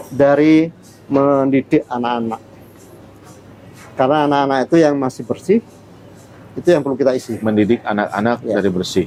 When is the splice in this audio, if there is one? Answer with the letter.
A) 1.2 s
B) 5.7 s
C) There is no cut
C